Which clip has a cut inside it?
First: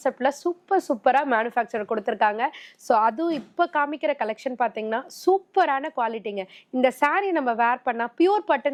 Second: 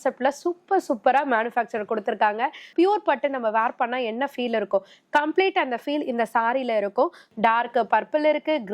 second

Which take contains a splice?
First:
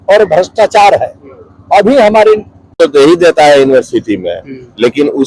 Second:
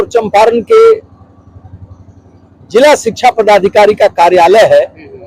first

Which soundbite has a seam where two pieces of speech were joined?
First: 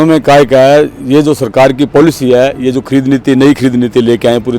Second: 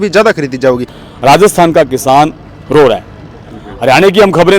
second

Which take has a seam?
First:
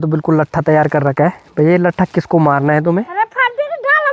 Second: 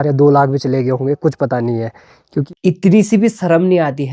second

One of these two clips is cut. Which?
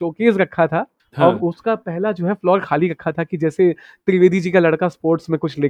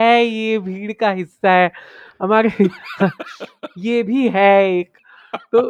first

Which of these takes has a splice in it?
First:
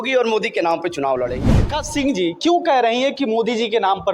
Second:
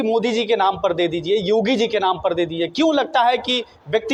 first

